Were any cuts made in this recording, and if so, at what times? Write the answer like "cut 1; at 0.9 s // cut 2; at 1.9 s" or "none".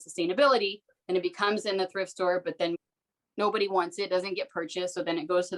cut 1; at 2.8 s